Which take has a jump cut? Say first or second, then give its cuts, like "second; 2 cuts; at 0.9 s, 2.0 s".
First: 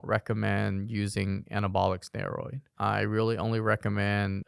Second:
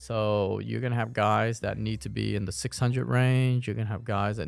first; 1 cut; at 2.6 s